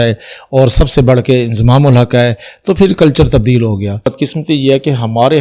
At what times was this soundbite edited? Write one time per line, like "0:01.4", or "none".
0:04.1